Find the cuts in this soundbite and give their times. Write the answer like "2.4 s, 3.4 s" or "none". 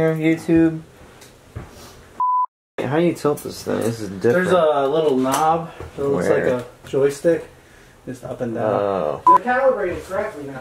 9.2 s